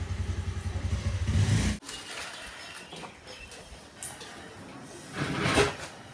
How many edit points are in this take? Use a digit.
1